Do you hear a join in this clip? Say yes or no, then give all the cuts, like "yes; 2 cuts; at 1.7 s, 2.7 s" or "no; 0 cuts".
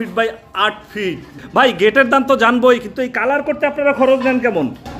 yes; 1 cut; at 1.4 s